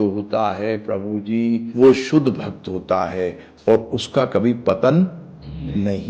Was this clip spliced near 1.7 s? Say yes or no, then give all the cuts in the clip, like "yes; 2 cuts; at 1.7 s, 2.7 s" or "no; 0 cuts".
yes; 1 cut; at 1.7 s